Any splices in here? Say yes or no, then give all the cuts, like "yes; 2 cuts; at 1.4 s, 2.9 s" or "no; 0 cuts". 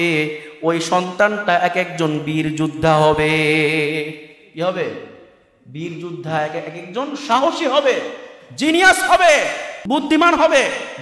yes; 1 cut; at 9.8 s